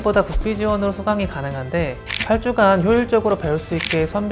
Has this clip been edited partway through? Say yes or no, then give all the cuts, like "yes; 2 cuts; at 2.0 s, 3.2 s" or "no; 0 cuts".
no; 0 cuts